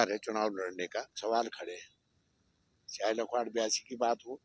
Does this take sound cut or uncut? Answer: cut